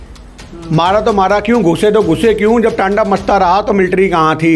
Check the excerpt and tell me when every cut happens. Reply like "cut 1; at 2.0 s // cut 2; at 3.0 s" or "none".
none